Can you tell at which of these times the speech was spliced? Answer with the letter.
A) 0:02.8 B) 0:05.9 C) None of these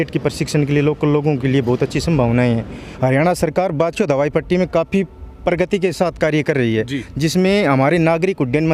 A